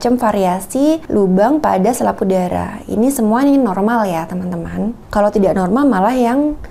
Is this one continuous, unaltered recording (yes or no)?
no